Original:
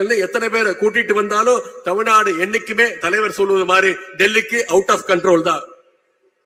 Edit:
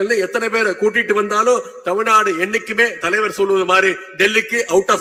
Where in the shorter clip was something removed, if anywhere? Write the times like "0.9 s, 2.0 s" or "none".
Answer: none